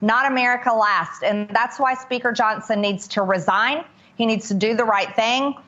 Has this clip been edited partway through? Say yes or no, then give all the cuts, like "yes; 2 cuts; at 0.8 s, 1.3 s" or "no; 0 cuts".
no; 0 cuts